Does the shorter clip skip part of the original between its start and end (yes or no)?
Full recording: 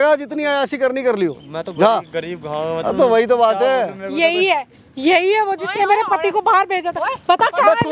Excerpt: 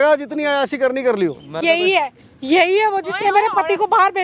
yes